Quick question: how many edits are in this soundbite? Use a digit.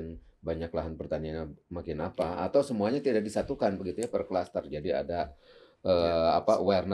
0